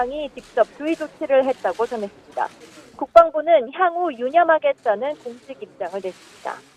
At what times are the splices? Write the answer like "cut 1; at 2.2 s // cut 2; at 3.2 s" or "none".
none